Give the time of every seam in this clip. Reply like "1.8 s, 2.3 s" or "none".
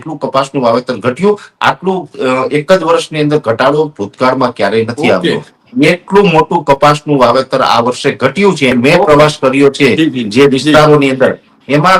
8.7 s